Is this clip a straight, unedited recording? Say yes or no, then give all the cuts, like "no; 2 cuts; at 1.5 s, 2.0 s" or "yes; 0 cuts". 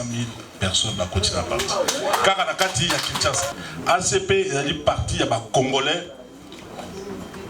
no; 1 cut; at 3.5 s